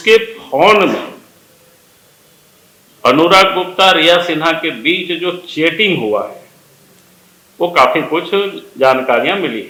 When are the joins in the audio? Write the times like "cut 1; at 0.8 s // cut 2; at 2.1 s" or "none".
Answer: none

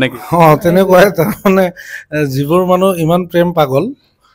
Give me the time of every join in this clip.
none

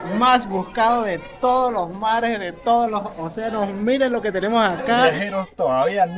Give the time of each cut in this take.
cut 1; at 5.0 s

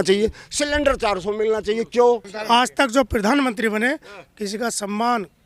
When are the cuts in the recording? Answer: cut 1; at 2.3 s

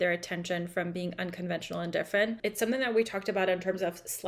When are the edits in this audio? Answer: cut 1; at 2.4 s

